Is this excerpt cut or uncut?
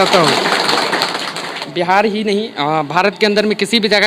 cut